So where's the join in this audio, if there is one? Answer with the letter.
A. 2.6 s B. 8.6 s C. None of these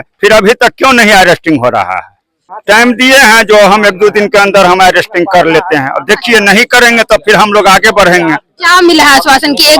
A